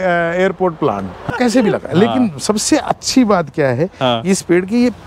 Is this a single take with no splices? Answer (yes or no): no